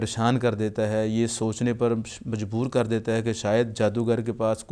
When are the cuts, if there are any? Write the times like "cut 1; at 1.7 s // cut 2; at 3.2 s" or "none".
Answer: none